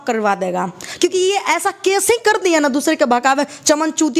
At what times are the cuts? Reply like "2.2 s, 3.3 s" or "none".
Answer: none

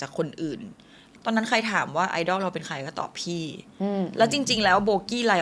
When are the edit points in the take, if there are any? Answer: 1.0 s

